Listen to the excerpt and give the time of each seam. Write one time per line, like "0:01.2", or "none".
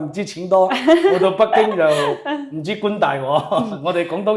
none